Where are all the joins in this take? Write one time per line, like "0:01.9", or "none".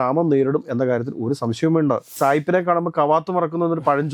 0:02.2